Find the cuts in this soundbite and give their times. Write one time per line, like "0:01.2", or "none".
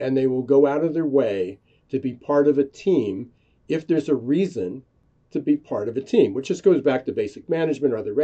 none